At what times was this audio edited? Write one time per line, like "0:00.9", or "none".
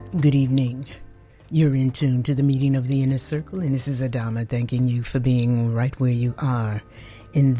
none